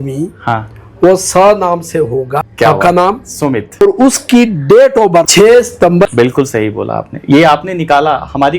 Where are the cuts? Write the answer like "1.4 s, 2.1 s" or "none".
2.4 s, 3.8 s, 5.3 s, 6.1 s

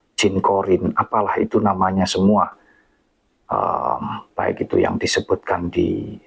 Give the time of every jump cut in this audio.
none

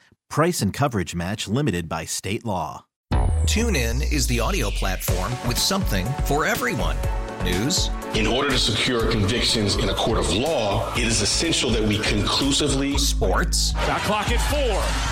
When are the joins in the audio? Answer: 2.9 s

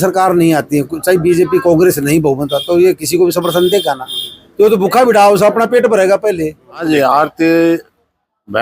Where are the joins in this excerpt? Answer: 6.8 s

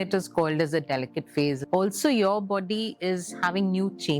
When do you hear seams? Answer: 1.6 s

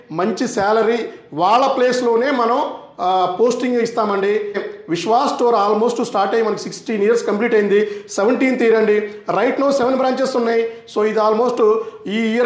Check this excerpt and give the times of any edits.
4.7 s

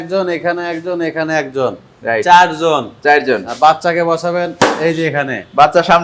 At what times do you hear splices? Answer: none

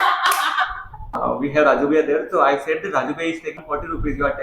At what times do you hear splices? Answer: 1.2 s, 3.6 s

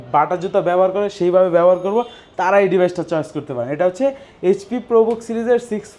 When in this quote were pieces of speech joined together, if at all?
none

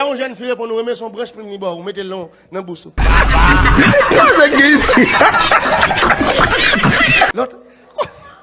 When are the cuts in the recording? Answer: 2.9 s, 7.3 s

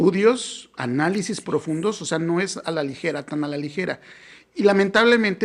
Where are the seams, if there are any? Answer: none

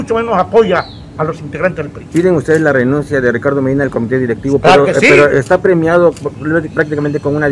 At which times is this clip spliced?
none

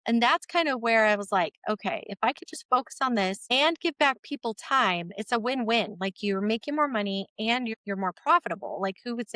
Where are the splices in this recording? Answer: 3.4 s, 7.7 s

